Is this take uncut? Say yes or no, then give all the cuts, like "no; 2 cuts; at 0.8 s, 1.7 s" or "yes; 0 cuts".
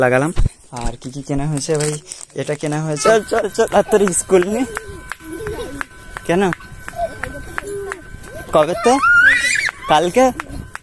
no; 1 cut; at 3.0 s